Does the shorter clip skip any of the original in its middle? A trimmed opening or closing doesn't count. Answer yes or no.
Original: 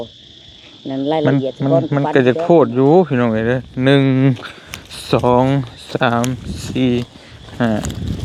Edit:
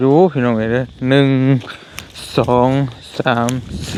no